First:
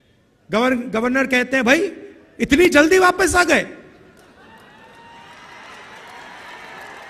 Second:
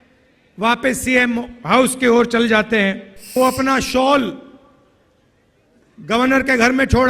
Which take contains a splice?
second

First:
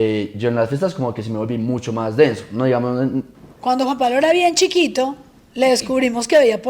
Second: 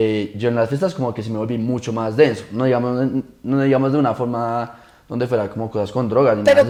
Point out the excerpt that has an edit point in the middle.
first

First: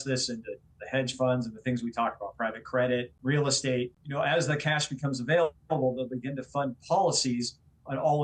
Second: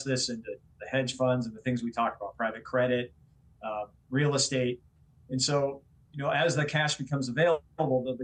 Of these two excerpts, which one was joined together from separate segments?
first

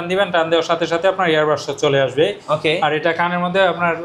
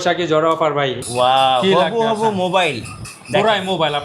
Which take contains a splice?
second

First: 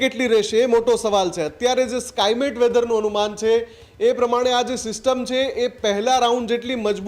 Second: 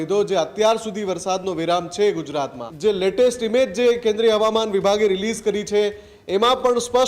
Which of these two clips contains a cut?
second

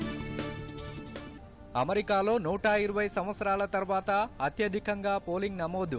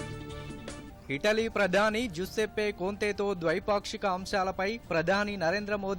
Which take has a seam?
first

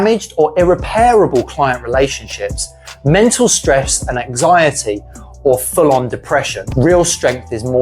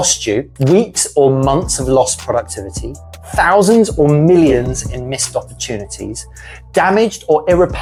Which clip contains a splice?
first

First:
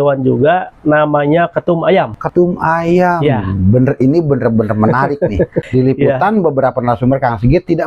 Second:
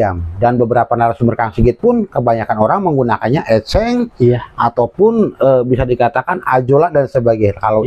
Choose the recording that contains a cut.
first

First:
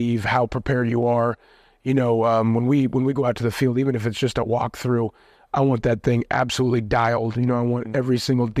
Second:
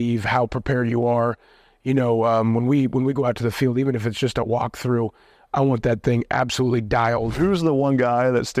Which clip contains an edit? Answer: second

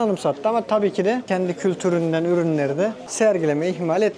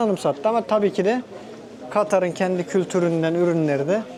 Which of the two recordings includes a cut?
first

